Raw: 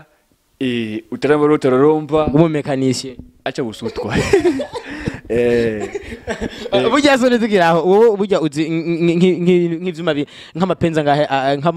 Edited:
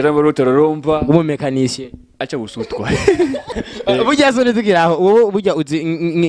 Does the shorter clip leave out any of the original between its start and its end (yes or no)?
yes